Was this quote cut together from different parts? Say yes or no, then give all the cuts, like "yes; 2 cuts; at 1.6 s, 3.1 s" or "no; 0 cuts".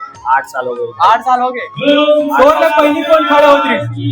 no; 0 cuts